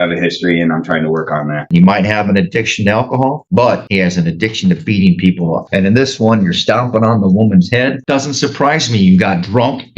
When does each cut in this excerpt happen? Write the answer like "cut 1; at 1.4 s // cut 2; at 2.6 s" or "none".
cut 1; at 1.7 s // cut 2; at 5.6 s // cut 3; at 8.0 s